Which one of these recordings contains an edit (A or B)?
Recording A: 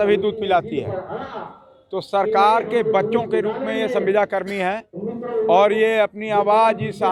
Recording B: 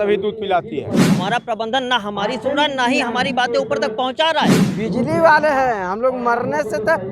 B